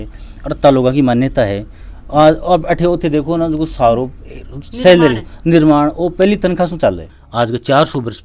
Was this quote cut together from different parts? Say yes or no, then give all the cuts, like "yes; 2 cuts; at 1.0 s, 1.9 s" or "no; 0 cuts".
yes; 1 cut; at 7.1 s